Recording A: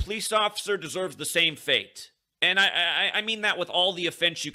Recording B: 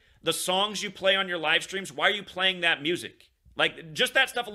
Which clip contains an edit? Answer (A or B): A